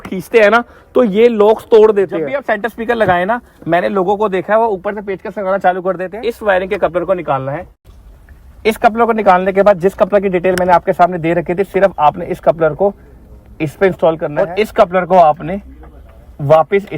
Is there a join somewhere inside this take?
yes; 3 cuts; at 2.3 s, 6.1 s, 14.3 s

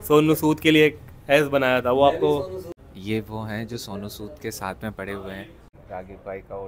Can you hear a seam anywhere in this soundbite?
yes; 2 cuts; at 2.8 s, 5.8 s

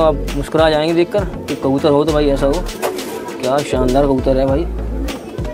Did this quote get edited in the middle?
no; 0 cuts

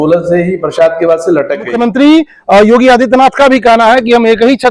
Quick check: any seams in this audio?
yes; 1 cut; at 1.7 s

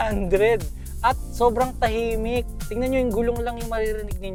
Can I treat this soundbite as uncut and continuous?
yes; 0 cuts

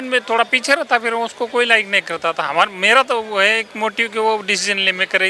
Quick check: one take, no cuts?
yes; 0 cuts

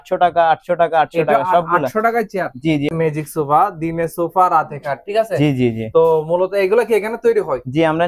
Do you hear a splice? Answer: yes; 1 cut; at 2.9 s

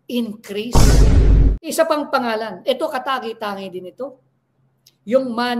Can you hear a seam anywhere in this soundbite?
yes; 1 cut; at 1.6 s

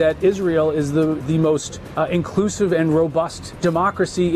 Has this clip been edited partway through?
yes; 2 cuts; at 1.4 s, 3.4 s

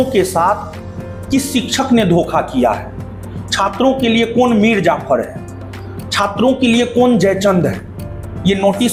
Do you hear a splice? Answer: no; 0 cuts

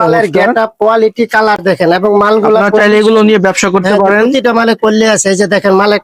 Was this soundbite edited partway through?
no; 0 cuts

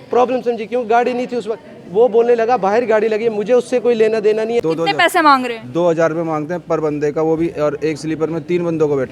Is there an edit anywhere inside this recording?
yes; 1 cut; at 4.6 s

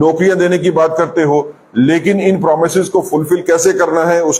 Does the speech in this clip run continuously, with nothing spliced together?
yes; 0 cuts

